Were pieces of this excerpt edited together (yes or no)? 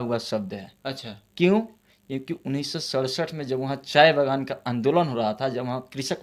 no